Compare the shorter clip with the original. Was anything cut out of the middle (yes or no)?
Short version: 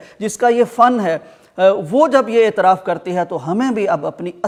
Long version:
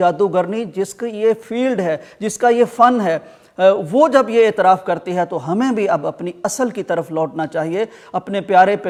no